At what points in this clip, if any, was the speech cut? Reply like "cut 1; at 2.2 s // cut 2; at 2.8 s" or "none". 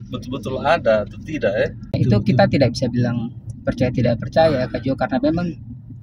cut 1; at 2.0 s